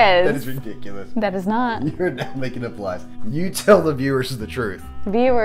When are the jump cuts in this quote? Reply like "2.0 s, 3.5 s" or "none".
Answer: 3.1 s

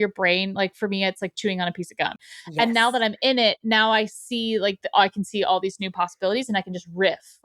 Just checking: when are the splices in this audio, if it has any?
2.2 s

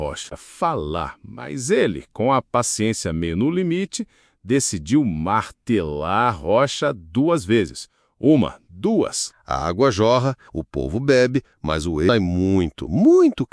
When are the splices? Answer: 9.8 s

